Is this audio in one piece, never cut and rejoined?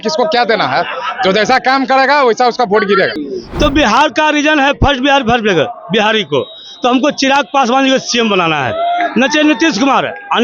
no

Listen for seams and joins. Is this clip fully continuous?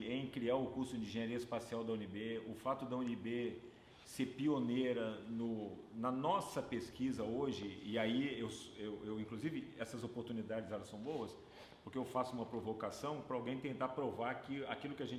yes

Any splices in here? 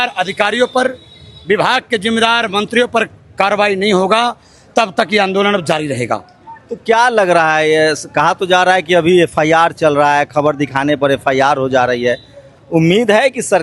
no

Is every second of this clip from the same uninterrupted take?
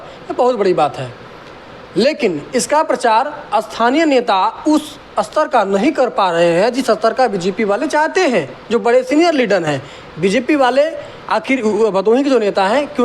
yes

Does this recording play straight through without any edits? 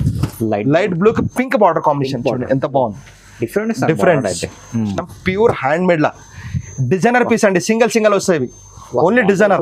no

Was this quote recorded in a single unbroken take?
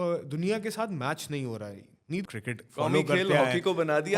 no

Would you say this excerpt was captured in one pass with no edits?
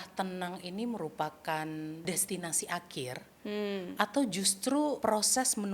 no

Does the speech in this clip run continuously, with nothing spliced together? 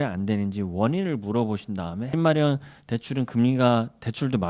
no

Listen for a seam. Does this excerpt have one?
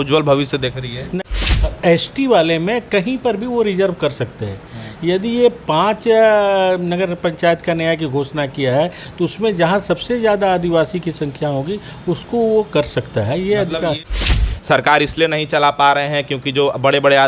yes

